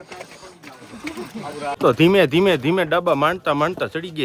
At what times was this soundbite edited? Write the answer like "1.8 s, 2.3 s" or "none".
none